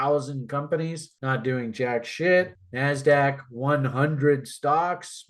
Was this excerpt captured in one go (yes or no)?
no